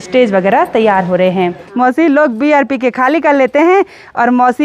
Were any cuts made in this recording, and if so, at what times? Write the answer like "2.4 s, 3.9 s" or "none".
1.6 s